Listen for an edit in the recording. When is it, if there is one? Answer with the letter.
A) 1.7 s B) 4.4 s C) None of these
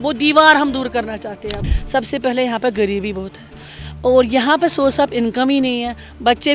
A